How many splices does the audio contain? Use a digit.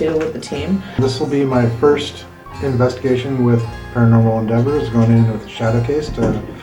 1